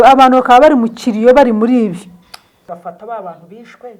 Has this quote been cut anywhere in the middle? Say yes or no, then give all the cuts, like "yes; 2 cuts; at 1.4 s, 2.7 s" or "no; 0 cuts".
yes; 1 cut; at 2.7 s